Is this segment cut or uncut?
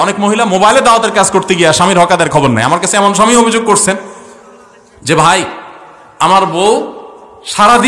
uncut